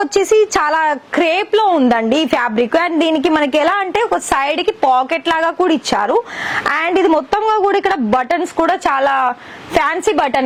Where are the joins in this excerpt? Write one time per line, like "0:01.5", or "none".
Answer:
none